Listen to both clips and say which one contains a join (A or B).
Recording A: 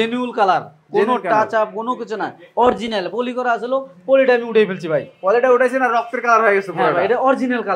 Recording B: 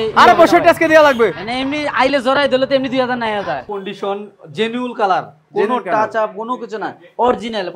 B